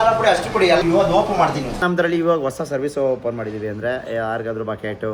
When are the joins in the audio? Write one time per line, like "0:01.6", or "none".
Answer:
0:01.8